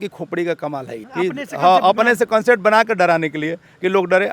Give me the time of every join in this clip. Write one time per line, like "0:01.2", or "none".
0:01.0